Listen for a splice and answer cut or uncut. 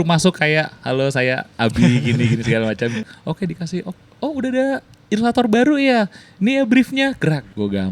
cut